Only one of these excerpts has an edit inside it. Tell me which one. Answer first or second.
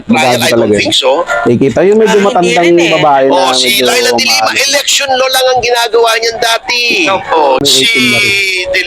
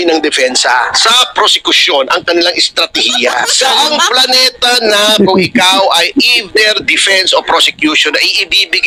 first